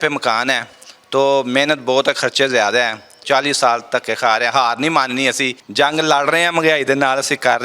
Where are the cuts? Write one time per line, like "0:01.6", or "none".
0:03.2
0:05.6